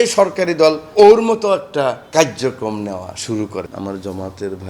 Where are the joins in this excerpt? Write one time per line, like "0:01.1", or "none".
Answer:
0:00.9
0:02.0
0:03.7